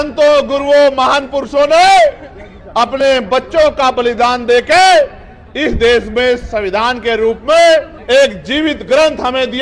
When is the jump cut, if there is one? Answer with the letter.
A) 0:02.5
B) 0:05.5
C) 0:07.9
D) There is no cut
C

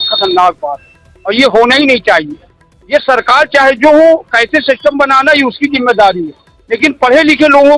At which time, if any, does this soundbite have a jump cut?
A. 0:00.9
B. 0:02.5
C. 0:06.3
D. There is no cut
D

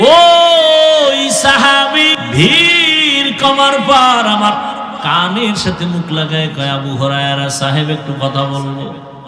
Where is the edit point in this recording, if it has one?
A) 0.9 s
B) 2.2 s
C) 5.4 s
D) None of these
B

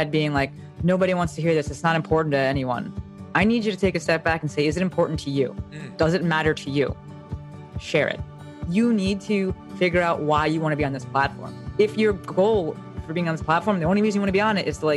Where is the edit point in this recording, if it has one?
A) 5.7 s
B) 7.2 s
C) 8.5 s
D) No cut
C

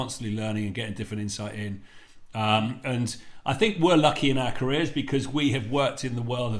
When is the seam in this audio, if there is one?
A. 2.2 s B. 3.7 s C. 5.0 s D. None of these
D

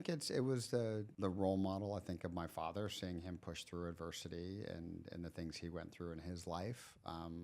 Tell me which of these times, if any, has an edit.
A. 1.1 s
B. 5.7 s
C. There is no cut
A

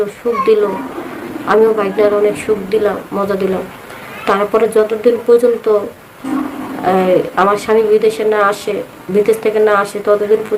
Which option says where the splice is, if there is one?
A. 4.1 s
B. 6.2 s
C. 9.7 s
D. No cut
D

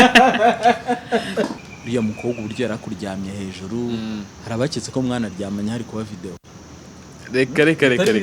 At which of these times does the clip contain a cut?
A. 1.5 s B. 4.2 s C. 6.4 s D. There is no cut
A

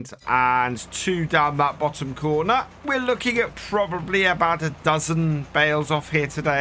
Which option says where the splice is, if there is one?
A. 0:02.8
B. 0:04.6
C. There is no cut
A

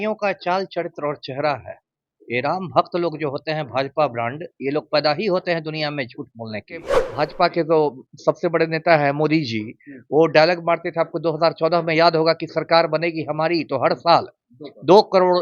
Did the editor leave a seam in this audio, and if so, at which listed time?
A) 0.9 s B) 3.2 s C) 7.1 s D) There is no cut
C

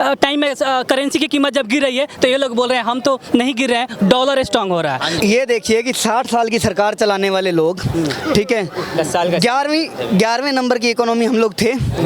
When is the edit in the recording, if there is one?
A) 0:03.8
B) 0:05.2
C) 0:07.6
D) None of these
B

